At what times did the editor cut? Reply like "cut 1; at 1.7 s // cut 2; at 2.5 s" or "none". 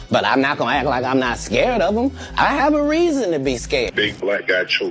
cut 1; at 3.9 s